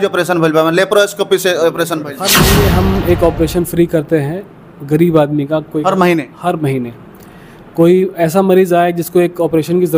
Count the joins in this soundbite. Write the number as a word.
one